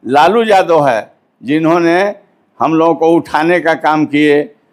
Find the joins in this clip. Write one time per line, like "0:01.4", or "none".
none